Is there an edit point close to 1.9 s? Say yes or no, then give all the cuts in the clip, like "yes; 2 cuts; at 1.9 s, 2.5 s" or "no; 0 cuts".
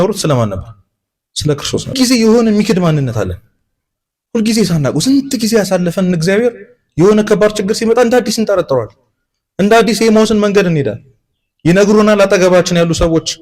yes; 1 cut; at 1.9 s